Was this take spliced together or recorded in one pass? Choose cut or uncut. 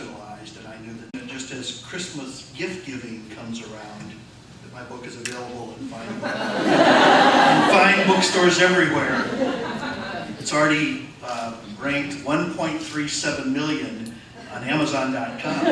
uncut